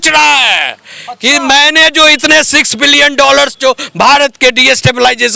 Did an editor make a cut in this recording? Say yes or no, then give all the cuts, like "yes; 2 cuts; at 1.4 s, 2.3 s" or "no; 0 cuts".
no; 0 cuts